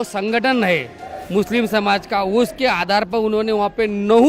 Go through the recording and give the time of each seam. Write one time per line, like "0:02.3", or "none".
none